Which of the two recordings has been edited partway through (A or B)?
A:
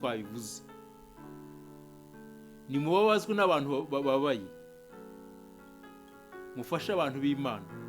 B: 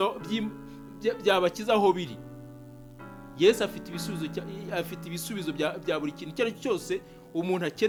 A